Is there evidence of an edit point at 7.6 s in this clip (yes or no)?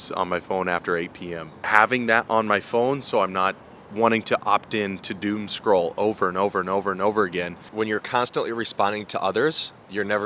yes